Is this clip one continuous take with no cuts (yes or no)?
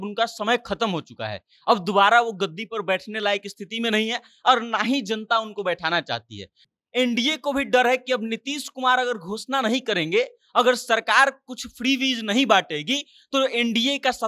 no